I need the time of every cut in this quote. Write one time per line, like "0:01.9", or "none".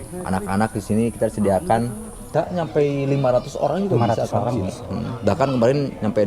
0:02.3

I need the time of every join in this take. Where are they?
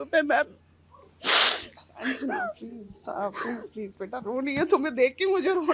none

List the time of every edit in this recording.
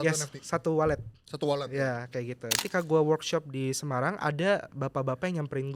0:02.6

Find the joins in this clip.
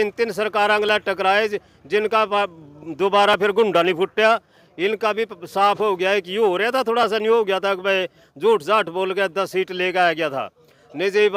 none

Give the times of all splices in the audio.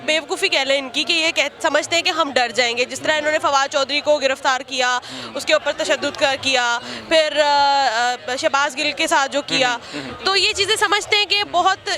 none

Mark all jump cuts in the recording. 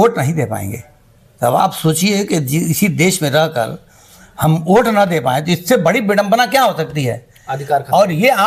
none

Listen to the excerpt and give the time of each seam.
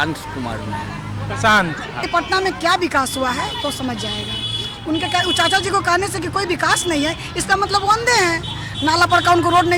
0:02.0

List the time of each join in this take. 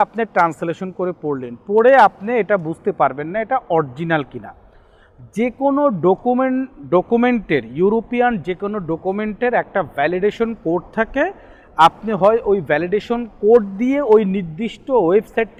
none

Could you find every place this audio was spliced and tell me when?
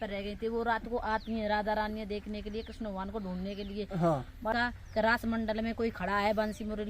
0:04.5

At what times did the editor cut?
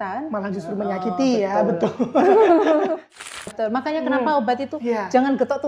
0:03.2

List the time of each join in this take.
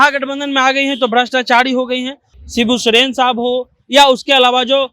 0:02.2

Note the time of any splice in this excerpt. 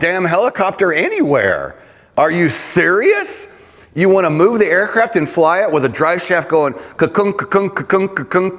none

